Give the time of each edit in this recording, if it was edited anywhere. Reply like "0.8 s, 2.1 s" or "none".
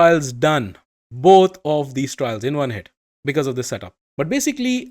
4.0 s